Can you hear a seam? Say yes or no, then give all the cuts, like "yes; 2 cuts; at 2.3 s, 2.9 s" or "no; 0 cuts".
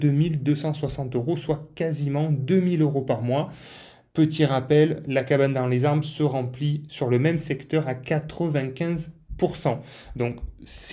no; 0 cuts